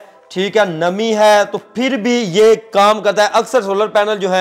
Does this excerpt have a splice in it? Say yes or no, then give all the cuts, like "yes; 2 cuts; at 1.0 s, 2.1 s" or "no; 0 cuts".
no; 0 cuts